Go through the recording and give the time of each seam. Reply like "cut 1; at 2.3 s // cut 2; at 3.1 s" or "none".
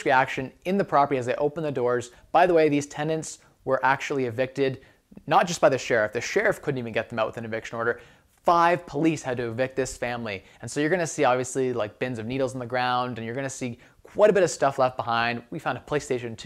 none